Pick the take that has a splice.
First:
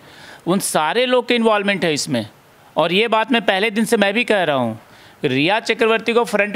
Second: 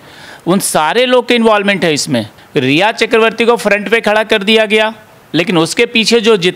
second; 1 cut; at 2.4 s

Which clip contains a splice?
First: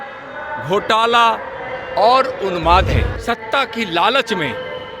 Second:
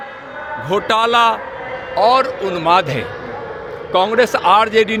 first; 1 cut; at 3.1 s

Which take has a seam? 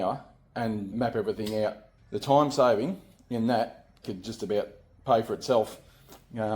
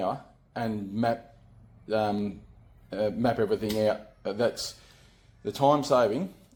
first; 3 cuts; at 0.9 s, 1.9 s, 4.0 s

